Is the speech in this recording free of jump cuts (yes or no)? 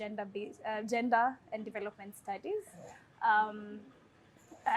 yes